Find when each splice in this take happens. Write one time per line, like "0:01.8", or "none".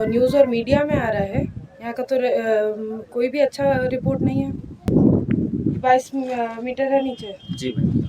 0:04.9